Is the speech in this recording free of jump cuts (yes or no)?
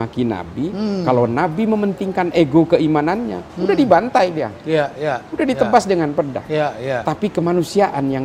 yes